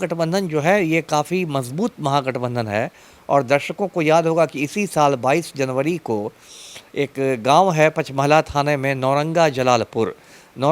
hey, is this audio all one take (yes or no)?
yes